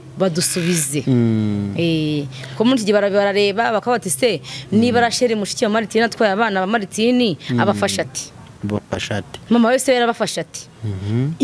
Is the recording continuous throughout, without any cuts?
yes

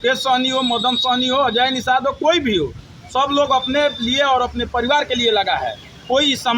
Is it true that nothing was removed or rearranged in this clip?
yes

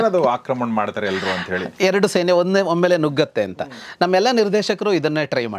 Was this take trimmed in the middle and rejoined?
no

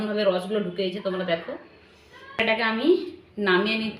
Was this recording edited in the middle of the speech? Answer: yes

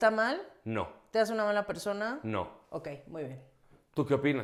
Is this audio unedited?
yes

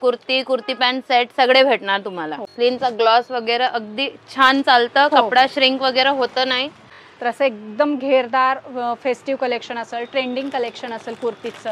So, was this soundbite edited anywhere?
yes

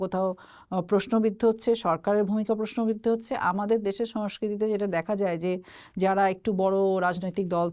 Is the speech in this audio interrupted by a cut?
no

